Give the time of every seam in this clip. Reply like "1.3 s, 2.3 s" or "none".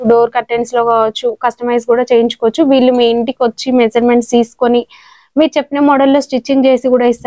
none